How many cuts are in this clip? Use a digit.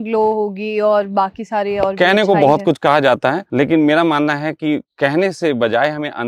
1